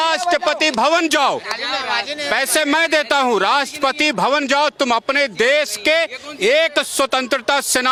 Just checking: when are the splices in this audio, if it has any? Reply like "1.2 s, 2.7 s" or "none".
none